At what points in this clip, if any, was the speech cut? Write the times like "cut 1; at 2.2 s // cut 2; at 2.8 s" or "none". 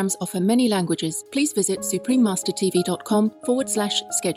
cut 1; at 1.2 s // cut 2; at 3.4 s

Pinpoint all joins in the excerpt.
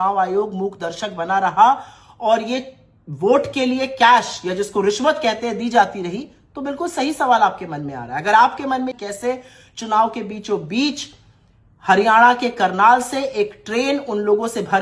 cut 1; at 9.0 s

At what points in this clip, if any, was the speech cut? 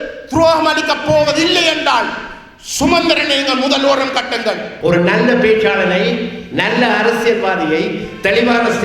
cut 1; at 4.7 s

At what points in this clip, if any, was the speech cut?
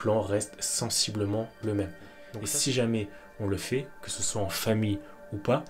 cut 1; at 2.3 s

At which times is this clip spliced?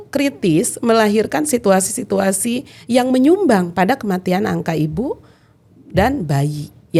none

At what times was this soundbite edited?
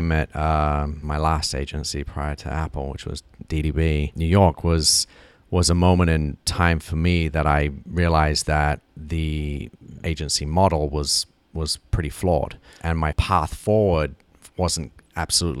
cut 1; at 1.0 s // cut 2; at 4.1 s // cut 3; at 10.0 s // cut 4; at 13.0 s

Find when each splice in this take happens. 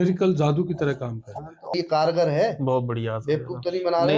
cut 1; at 1.7 s

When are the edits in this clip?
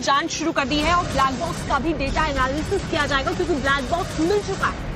cut 1; at 2.2 s

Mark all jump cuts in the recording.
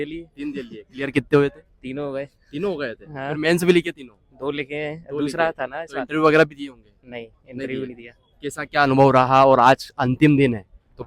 none

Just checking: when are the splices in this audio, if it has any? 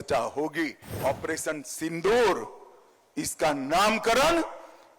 cut 1; at 1.0 s

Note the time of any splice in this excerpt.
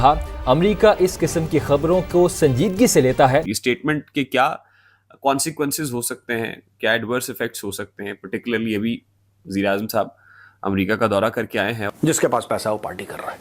cut 1; at 3.5 s // cut 2; at 11.8 s

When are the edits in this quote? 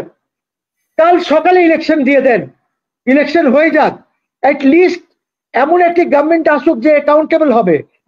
none

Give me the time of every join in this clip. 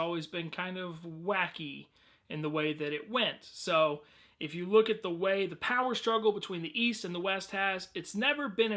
cut 1; at 6.4 s

